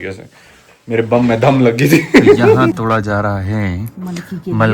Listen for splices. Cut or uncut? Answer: cut